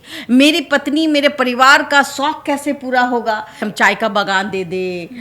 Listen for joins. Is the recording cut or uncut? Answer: cut